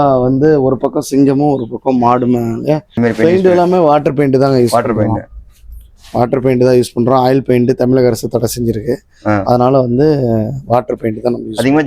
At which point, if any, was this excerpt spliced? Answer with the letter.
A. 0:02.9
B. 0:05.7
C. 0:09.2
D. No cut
A